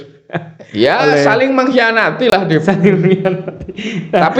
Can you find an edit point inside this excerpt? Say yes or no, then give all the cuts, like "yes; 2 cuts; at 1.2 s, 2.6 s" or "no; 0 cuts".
no; 0 cuts